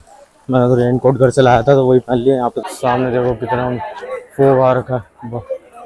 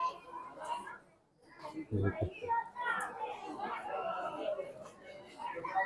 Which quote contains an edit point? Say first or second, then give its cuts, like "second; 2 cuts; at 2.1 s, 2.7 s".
first; 1 cut; at 2.6 s